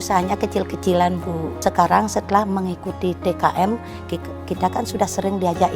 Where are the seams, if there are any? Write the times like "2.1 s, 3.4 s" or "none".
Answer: 1.5 s